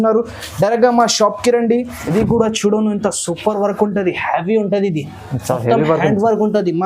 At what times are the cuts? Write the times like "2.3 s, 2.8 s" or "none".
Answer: 2.0 s

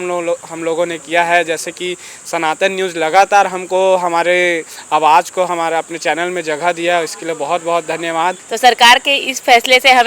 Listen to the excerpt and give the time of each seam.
8.5 s

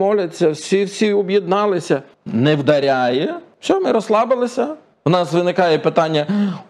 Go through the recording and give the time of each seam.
2.2 s, 3.5 s, 4.9 s

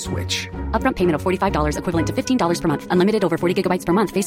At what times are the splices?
none

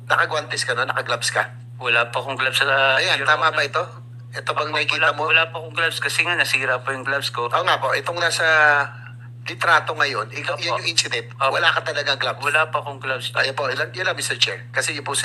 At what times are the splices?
none

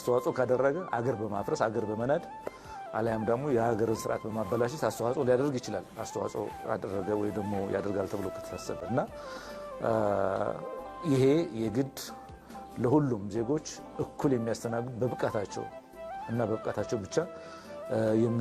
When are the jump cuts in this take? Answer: none

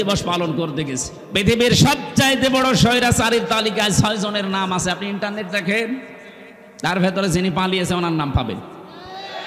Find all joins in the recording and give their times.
1.1 s

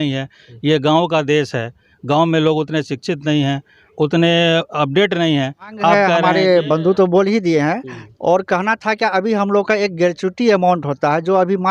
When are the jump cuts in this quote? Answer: 5.9 s

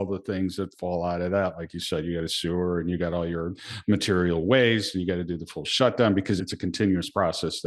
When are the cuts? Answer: 6.4 s

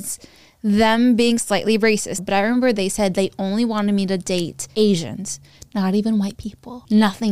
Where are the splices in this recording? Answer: 2.1 s

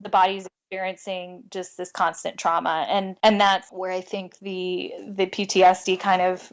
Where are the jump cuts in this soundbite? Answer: 3.1 s, 3.7 s

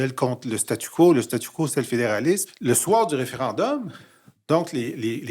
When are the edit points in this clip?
2.5 s

